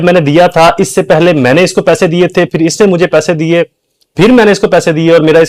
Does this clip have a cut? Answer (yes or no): no